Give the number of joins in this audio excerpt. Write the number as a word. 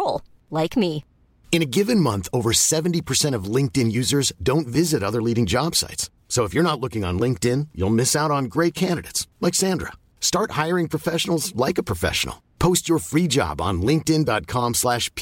zero